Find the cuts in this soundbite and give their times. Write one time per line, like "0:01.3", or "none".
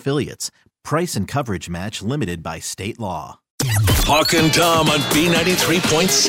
0:03.7